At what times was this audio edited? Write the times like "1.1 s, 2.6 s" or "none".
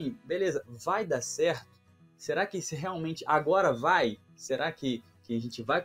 none